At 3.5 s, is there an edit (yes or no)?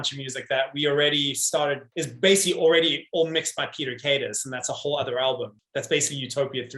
no